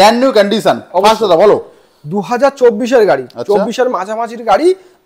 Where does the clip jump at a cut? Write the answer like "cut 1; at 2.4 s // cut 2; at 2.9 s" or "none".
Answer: none